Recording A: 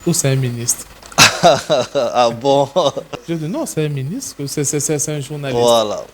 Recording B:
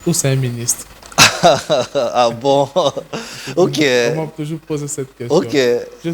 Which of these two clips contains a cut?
A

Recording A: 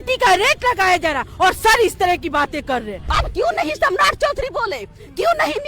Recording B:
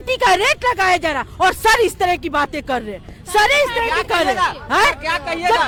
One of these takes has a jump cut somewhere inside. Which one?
A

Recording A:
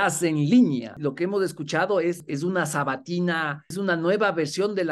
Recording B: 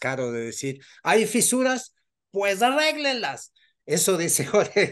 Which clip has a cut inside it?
A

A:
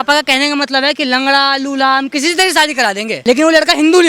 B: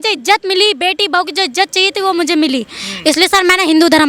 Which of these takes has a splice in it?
A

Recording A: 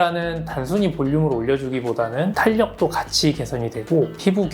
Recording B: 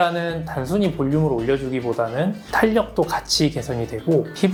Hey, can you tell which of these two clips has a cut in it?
A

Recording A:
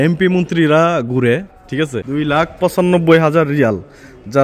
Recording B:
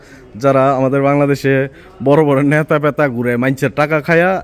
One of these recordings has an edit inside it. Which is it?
A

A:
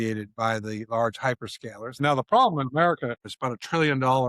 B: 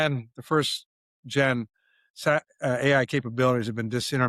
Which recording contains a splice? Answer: A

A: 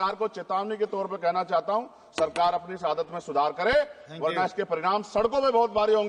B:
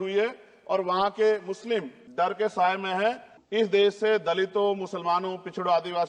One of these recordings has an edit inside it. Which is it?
B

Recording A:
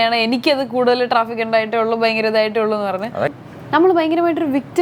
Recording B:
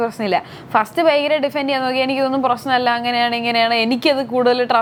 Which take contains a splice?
A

